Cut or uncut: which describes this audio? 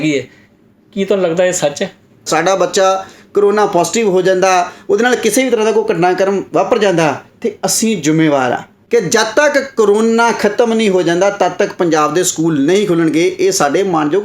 cut